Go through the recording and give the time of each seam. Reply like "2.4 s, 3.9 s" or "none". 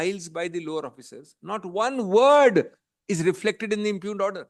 none